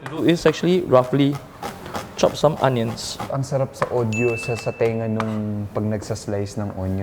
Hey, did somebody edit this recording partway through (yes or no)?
yes